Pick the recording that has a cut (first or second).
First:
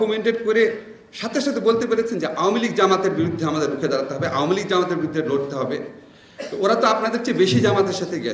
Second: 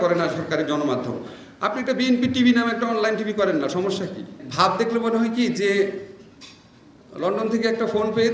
second